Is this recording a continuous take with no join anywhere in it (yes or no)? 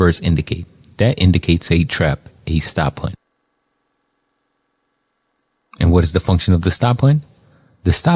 yes